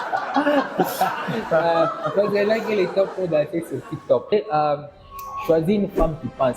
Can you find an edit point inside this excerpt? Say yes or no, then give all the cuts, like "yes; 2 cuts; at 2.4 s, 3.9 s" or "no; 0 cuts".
yes; 1 cut; at 4.3 s